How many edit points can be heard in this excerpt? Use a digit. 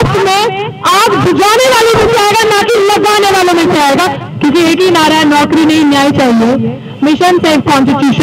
1